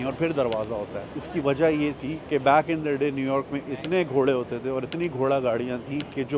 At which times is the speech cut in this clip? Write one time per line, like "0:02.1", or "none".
0:01.0